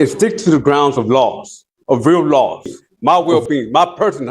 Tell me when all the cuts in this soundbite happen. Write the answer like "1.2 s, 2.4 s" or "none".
2.8 s

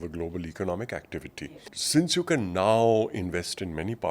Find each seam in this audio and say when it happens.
1.7 s

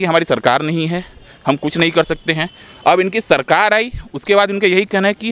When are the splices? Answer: none

